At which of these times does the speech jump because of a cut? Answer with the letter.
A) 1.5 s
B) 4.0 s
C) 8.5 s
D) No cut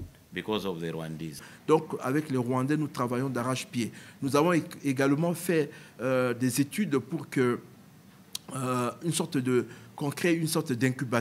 A